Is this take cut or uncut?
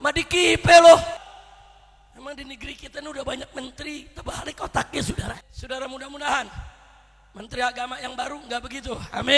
cut